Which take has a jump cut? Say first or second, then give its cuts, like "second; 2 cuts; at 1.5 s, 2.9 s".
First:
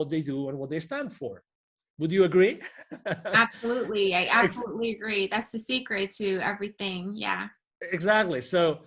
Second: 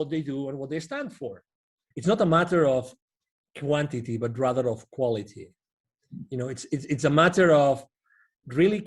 second; 1 cut; at 1.8 s